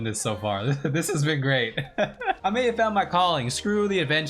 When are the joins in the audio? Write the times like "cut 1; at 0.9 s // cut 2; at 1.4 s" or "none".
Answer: cut 1; at 2.4 s